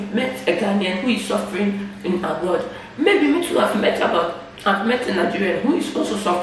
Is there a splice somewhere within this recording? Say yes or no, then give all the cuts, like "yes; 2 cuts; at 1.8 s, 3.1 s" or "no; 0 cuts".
no; 0 cuts